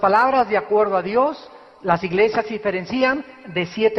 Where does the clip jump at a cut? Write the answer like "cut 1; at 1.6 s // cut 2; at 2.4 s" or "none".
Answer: cut 1; at 1.7 s